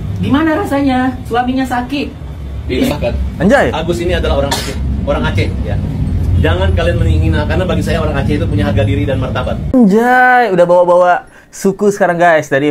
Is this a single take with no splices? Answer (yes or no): yes